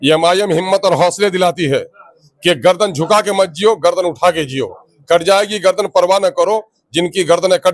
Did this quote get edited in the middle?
no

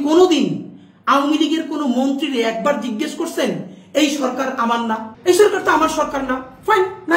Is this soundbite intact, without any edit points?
no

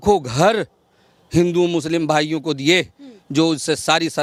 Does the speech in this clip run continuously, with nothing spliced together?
yes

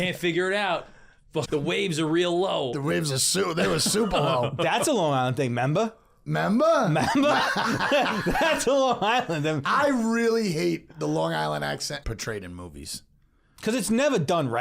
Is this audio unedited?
no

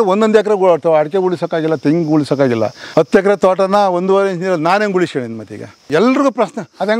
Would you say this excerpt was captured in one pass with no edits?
no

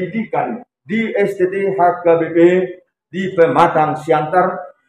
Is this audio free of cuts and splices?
yes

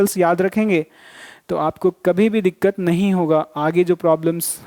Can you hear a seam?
no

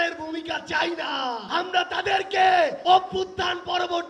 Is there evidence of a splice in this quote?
yes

